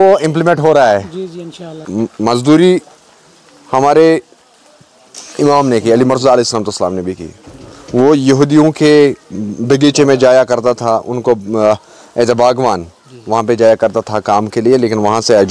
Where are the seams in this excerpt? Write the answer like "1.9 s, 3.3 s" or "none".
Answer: 1.9 s